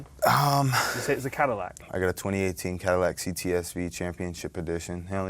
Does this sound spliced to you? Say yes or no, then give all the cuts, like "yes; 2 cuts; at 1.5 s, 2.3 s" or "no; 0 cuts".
yes; 1 cut; at 1.8 s